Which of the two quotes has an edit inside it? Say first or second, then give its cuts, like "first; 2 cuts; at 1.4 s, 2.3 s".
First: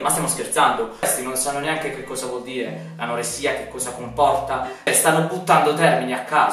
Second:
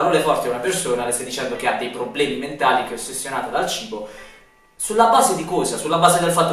first; 2 cuts; at 1.0 s, 4.9 s